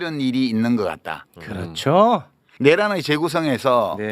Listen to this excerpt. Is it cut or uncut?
uncut